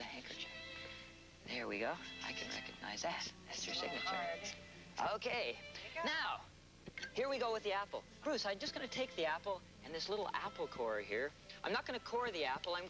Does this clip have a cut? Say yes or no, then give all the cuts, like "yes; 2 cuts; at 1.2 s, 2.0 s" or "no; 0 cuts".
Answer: no; 0 cuts